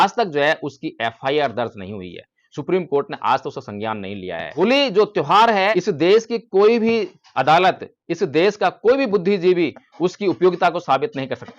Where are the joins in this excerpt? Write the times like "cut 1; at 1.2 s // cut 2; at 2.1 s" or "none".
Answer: cut 1; at 4.5 s // cut 2; at 5.8 s